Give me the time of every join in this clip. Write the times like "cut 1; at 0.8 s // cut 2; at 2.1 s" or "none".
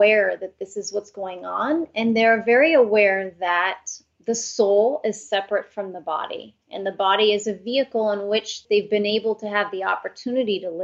cut 1; at 8.6 s